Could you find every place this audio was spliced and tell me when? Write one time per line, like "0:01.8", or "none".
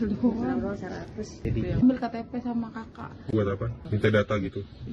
0:01.4
0:03.8